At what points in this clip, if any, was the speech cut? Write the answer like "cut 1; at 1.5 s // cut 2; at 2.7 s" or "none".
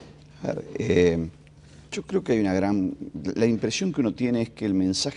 cut 1; at 3.1 s